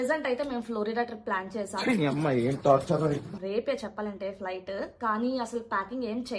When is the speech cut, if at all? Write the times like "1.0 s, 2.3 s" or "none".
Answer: none